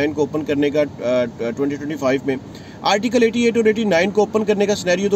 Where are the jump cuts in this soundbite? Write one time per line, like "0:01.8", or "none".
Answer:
none